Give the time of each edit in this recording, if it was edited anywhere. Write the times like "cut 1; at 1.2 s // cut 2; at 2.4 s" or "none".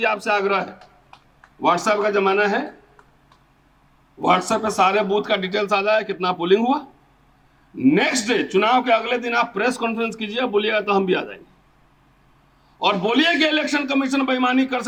none